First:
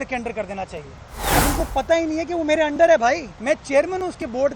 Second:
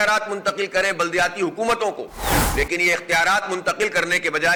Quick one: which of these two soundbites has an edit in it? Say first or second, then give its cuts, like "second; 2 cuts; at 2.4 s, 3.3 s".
first; 2 cuts; at 1.3 s, 3.3 s